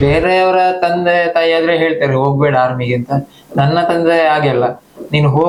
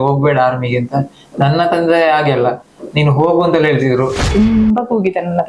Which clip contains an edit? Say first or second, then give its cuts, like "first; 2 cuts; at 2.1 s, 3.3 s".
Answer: second; 1 cut; at 4.3 s